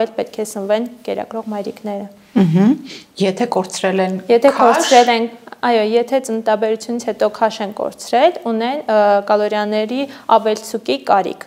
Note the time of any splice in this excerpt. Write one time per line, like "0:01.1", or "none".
none